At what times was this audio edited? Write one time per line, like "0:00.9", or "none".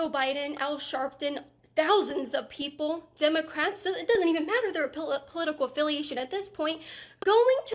0:04.2